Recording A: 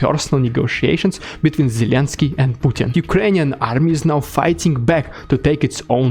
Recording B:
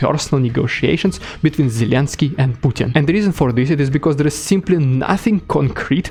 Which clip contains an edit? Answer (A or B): A